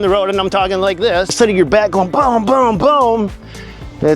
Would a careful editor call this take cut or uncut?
cut